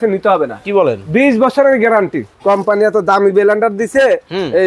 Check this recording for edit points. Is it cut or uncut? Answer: cut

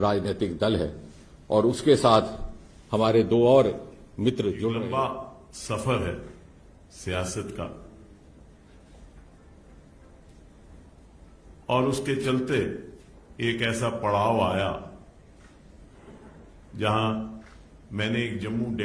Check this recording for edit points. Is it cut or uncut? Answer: cut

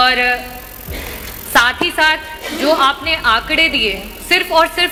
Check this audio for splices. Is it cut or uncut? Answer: uncut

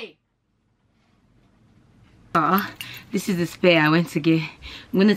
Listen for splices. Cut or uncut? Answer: cut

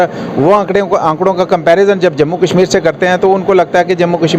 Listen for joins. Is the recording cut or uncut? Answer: cut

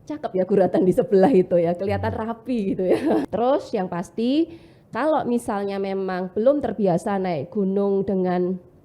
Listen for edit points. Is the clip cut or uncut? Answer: cut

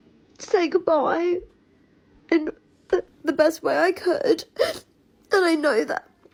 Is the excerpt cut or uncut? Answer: uncut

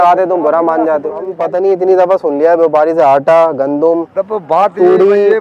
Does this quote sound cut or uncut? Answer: cut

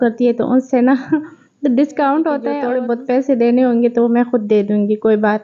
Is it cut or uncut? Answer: cut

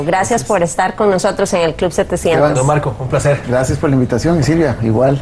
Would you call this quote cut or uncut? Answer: uncut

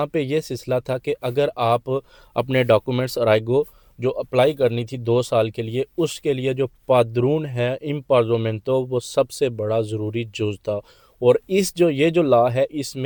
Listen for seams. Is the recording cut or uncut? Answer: uncut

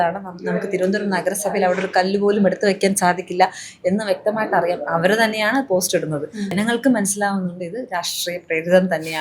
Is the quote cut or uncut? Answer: cut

